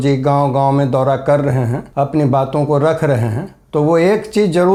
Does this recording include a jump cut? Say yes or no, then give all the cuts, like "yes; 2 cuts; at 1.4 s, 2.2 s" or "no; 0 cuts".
no; 0 cuts